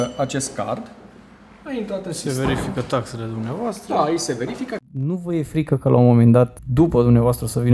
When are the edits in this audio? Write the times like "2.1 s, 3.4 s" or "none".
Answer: 4.8 s, 6.6 s